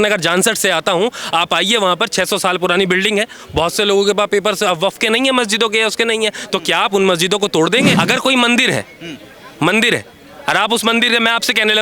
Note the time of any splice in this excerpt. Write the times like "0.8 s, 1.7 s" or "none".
8.0 s